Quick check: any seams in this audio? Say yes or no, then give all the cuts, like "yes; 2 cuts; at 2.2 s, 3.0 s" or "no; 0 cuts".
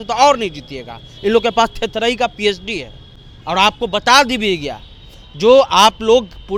no; 0 cuts